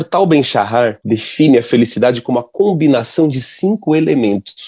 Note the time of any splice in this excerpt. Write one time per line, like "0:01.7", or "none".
0:01.0